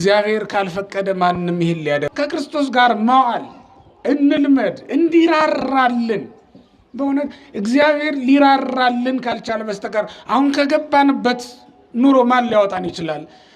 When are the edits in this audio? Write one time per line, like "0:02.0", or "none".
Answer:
0:02.1